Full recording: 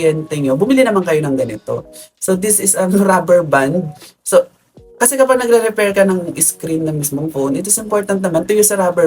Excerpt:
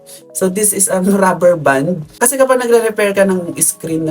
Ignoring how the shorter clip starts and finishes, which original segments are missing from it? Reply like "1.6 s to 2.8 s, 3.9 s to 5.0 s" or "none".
3.9 s to 4.8 s